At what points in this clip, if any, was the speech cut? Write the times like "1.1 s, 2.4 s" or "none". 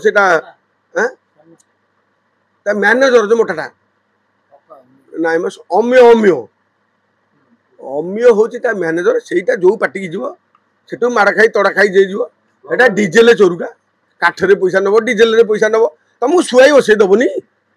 none